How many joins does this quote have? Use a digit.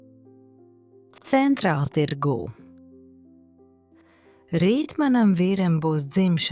1